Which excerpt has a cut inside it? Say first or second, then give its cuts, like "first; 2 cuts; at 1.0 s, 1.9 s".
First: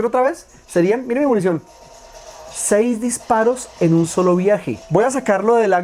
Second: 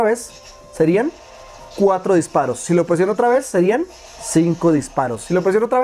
first; 1 cut; at 4.7 s